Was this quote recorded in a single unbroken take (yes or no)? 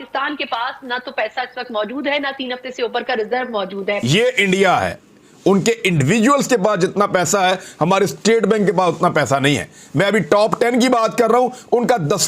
no